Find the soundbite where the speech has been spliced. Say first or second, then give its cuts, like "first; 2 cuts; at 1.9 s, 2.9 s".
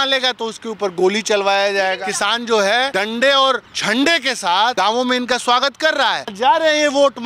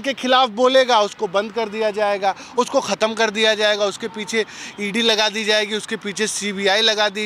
first; 5 cuts; at 2.0 s, 2.9 s, 3.7 s, 4.7 s, 6.3 s